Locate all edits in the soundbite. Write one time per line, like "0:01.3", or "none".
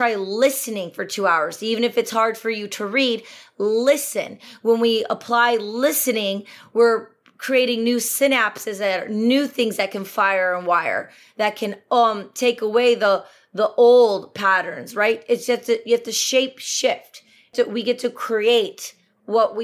0:17.5